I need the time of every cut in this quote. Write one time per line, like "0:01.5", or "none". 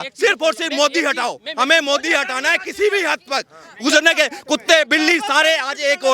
none